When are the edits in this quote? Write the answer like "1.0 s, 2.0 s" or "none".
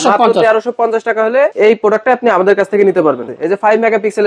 1.5 s, 3.3 s